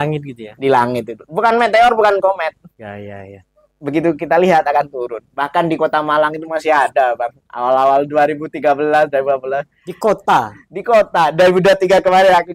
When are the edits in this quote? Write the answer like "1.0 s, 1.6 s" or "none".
none